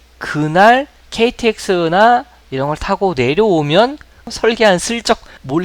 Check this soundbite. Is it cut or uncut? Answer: cut